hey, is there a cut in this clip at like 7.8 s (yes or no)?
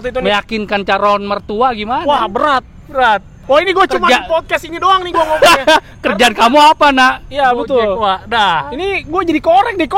no